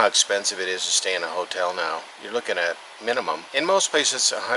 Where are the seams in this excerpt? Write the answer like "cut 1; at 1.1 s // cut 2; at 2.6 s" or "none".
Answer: cut 1; at 3.4 s